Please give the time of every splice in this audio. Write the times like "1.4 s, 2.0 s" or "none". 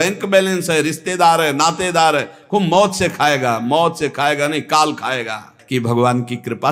5.5 s